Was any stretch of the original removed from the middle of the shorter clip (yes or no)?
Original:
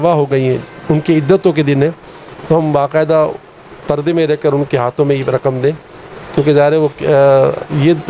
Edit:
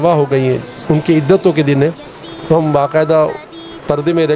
no